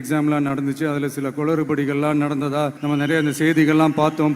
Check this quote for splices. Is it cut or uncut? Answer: cut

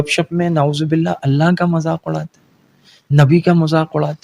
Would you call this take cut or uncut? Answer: uncut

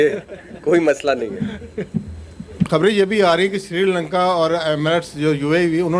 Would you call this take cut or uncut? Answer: cut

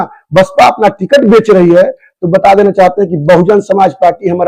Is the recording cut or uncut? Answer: uncut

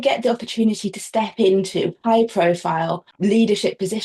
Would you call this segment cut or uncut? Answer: cut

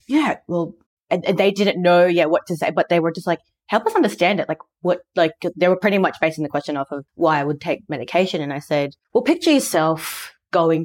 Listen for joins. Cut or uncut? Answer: cut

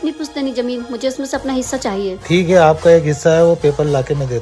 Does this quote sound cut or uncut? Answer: uncut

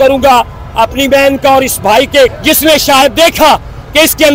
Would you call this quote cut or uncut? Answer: cut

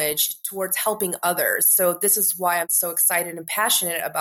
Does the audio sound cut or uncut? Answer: cut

